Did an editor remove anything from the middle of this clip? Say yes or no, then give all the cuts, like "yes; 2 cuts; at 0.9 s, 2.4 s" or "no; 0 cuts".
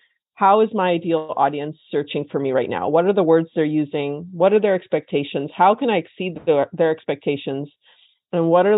no; 0 cuts